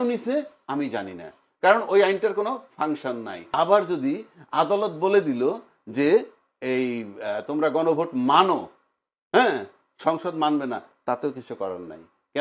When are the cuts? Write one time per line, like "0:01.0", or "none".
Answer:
0:03.4